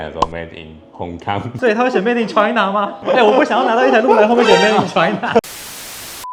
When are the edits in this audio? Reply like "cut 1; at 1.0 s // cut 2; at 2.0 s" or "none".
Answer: none